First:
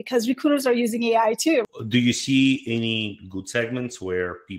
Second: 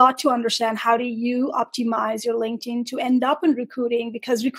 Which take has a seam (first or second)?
first